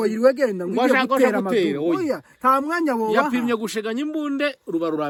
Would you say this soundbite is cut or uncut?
uncut